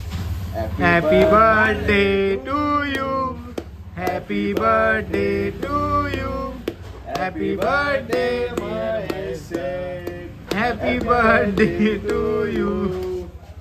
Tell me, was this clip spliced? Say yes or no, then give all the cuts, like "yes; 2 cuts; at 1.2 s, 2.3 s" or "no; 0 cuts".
no; 0 cuts